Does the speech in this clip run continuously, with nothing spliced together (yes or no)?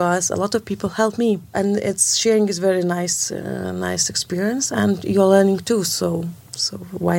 no